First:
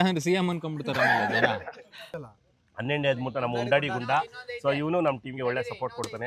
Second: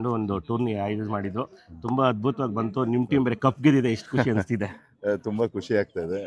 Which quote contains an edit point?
first; 1 cut; at 1.9 s

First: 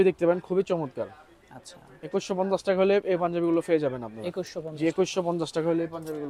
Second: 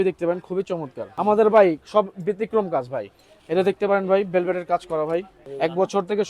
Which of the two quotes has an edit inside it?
second; 2 cuts; at 1.0 s, 5.4 s

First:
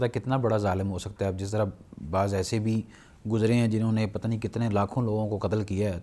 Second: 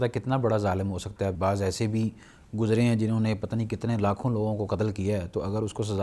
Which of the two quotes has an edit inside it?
second; 1 cut; at 1.4 s

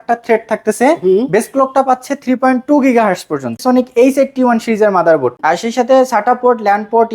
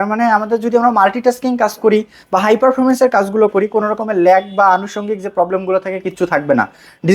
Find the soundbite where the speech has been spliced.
first; 2 cuts; at 3.5 s, 5.4 s

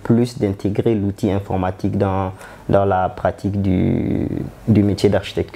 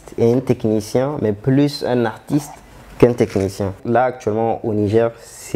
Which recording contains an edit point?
second; 1 cut; at 3.8 s

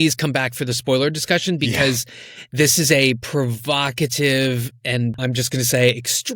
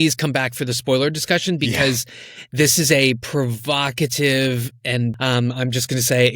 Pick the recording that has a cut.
first; 1 cut; at 5.2 s

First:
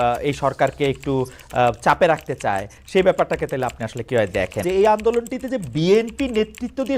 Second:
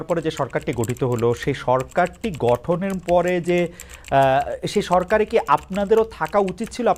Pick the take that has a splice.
first; 1 cut; at 4.6 s

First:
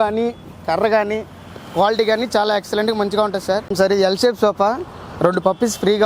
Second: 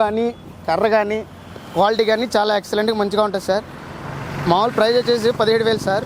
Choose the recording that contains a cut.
first; 1 cut; at 3.7 s

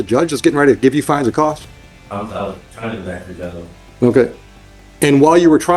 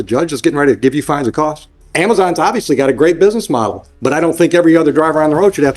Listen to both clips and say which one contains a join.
second; 1 cut; at 1.8 s

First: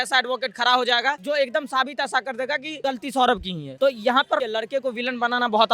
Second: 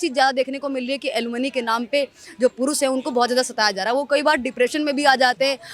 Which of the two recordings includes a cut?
first; 4 cuts; at 1.2 s, 2.8 s, 3.6 s, 4.4 s

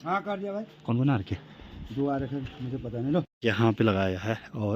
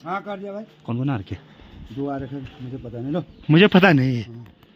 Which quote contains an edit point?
first; 1 cut; at 3.3 s

